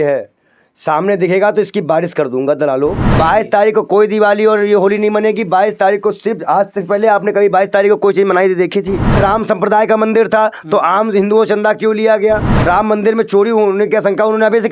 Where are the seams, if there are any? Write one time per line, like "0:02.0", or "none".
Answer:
0:03.1
0:09.2
0:12.5